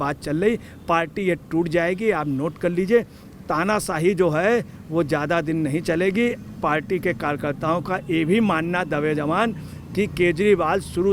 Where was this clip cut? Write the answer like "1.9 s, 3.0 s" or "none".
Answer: none